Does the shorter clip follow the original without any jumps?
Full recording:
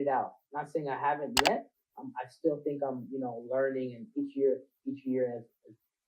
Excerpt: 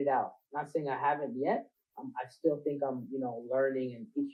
yes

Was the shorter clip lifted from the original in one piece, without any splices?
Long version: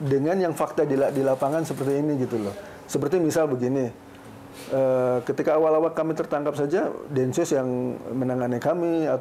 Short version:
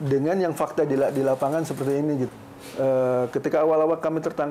no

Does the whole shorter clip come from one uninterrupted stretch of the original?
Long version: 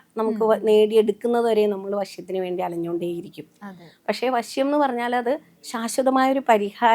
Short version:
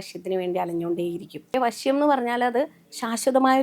no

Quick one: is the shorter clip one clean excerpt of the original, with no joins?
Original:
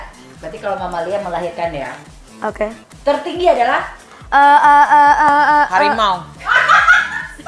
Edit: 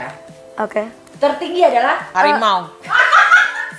no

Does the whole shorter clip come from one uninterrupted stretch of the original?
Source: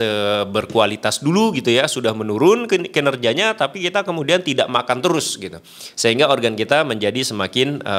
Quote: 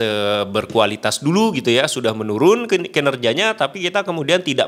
yes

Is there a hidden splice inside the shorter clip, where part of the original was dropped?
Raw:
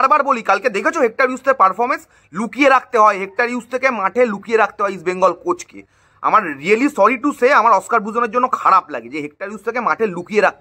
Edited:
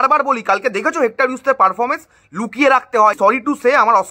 yes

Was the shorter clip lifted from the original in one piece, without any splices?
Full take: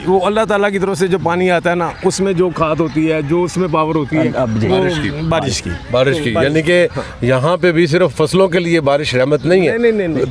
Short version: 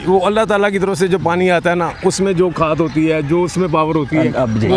yes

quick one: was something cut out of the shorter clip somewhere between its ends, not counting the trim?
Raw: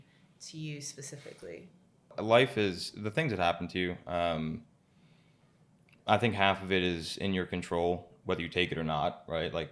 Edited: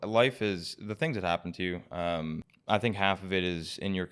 yes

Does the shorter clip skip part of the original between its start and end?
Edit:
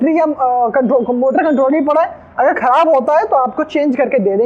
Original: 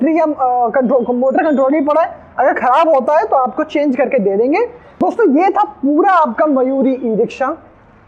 no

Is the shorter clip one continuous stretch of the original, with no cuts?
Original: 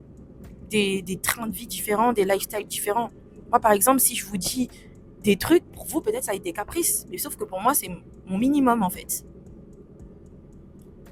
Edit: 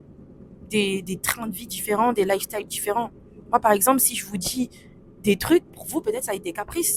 yes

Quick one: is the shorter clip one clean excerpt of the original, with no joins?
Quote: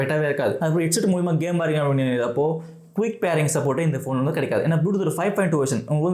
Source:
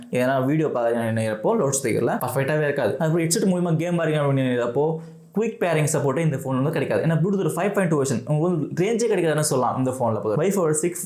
yes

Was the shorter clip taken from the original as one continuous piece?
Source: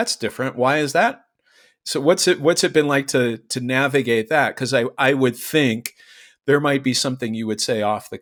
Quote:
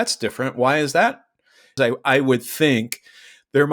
no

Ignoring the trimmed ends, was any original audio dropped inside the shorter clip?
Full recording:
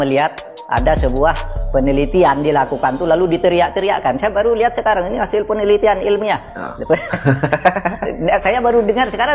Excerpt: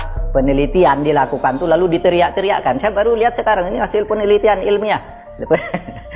no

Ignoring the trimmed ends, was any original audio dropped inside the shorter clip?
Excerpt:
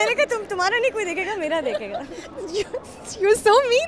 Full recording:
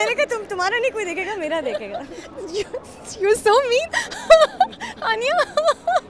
no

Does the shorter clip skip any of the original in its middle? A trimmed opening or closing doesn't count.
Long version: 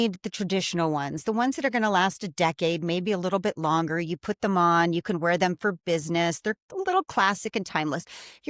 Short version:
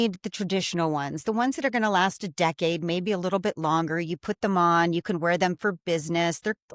no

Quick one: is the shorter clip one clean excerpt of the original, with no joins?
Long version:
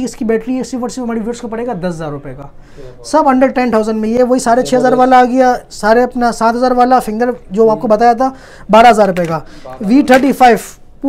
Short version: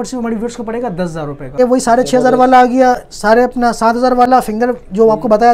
no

